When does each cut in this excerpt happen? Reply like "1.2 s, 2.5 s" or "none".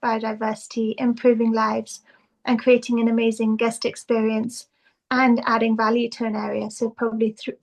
none